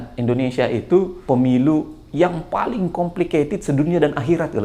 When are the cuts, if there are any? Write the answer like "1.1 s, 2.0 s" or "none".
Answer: 1.1 s